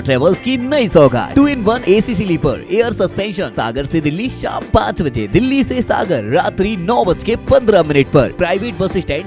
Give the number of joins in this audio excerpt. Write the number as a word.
three